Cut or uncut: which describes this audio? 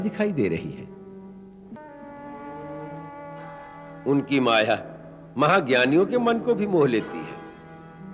cut